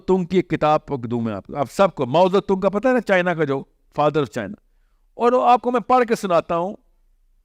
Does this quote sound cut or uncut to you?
uncut